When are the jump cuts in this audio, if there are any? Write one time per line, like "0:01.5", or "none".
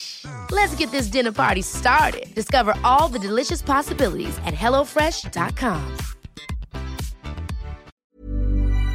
0:07.9